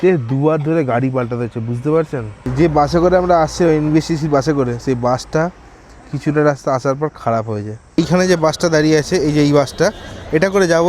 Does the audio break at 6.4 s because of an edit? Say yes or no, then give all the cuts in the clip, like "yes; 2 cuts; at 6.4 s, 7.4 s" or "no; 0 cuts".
no; 2 cuts; at 2.4 s, 8.0 s